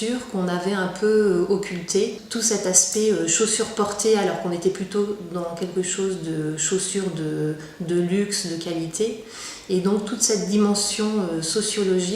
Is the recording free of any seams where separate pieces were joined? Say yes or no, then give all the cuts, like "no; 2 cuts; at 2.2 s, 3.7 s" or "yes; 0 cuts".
no; 1 cut; at 0.9 s